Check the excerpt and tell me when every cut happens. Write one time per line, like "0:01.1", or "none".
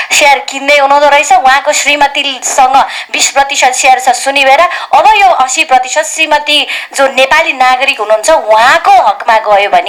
none

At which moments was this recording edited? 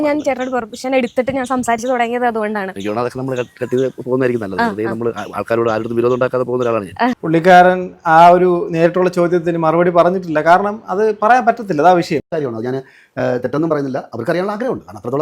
0:07.2
0:12.3

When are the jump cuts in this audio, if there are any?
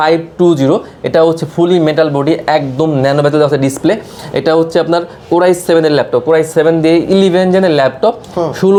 none

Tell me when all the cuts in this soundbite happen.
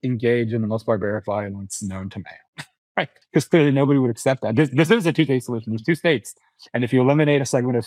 0:03.2

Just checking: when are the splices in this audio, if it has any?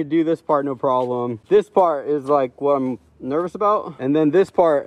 0:01.4
0:03.9

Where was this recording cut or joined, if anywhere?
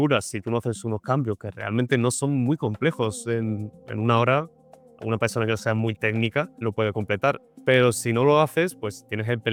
none

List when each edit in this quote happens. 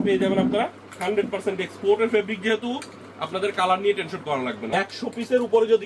0:04.6

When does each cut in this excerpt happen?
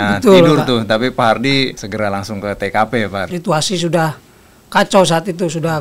0:01.8
0:03.3

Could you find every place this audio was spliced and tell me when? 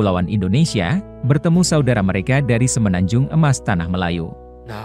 none

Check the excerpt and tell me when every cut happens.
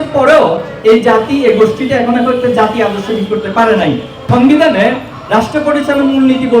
0:04.1

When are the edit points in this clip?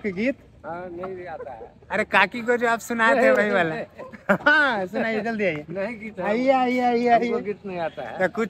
none

